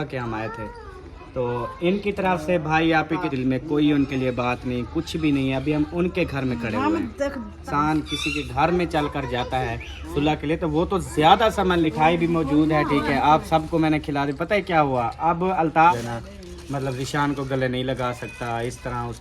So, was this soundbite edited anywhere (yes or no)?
yes